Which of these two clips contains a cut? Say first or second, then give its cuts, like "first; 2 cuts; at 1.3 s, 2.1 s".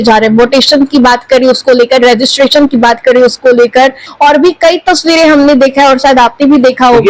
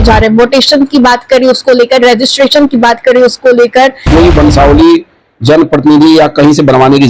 second; 1 cut; at 4.0 s